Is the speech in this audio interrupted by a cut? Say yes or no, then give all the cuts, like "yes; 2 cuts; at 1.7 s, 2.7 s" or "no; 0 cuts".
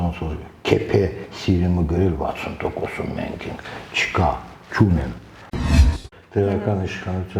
yes; 1 cut; at 5.6 s